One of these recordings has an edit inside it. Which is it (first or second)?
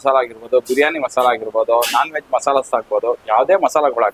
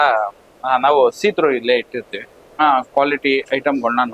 second